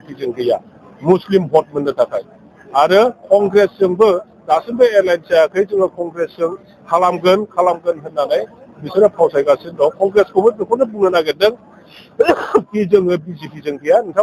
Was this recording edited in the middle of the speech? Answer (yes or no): no